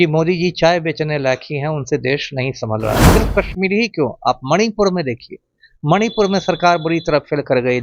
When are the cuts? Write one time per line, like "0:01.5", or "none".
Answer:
0:03.1